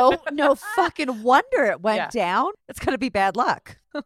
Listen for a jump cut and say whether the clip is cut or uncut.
cut